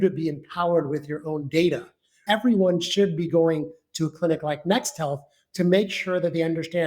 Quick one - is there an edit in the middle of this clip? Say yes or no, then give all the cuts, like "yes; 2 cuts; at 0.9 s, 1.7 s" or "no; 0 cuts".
yes; 1 cut; at 2.2 s